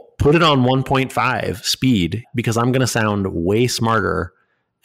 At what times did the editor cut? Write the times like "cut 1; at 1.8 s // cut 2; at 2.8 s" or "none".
cut 1; at 2.2 s